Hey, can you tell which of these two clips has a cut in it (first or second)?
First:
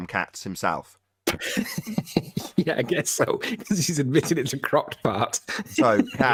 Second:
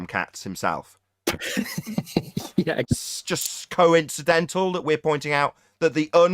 second